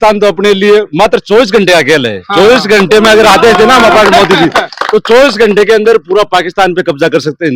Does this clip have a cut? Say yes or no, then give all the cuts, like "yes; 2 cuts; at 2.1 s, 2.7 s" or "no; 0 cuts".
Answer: no; 0 cuts